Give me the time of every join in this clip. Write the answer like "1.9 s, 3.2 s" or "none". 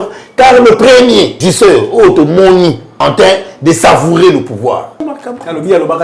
1.4 s, 2.9 s, 5.0 s